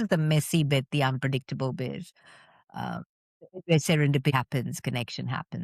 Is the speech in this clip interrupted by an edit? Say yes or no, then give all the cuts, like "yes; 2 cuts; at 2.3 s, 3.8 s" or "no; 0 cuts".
yes; 1 cut; at 4.3 s